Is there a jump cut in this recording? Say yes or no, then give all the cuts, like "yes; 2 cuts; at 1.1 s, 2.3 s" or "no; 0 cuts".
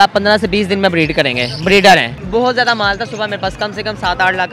yes; 1 cut; at 2.2 s